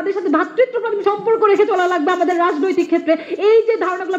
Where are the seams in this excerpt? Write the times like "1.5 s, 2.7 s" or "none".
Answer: none